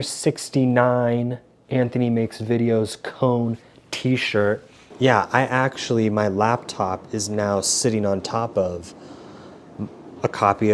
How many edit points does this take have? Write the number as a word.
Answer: one